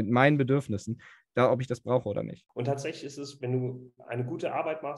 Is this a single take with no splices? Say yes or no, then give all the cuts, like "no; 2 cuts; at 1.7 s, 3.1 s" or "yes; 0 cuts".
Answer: no; 1 cut; at 2.4 s